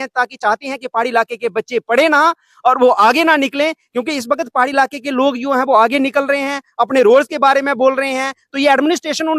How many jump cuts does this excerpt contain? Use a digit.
0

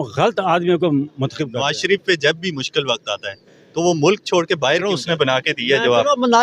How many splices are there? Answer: 2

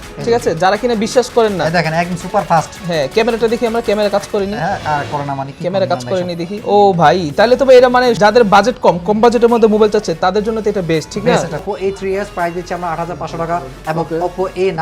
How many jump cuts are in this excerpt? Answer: 3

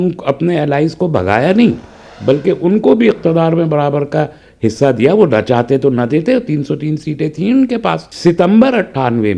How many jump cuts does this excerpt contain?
1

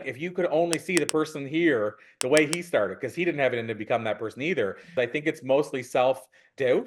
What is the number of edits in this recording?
1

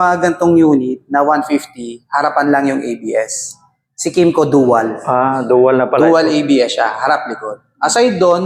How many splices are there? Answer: 0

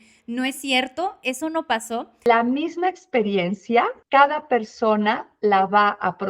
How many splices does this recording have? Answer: 2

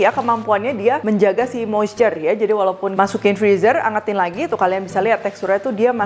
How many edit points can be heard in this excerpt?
2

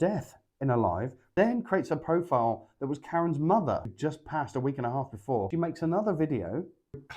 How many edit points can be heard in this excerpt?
3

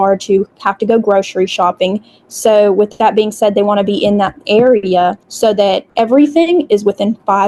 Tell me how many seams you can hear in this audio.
0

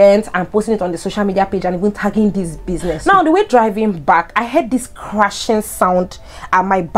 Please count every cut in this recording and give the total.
1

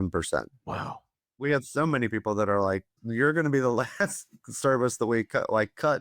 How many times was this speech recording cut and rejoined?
2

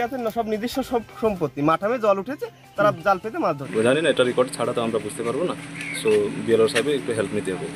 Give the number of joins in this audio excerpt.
1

